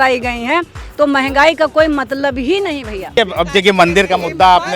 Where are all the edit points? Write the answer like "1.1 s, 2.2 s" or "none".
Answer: 3.1 s